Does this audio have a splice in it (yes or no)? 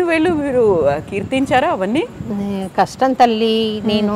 no